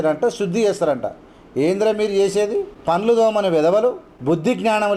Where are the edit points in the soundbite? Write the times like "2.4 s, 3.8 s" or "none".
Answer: 2.7 s, 4.1 s